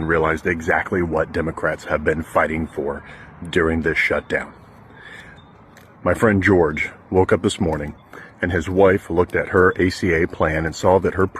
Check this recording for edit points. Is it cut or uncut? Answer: uncut